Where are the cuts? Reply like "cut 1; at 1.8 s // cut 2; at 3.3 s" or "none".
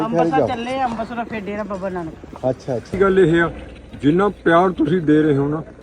cut 1; at 3.0 s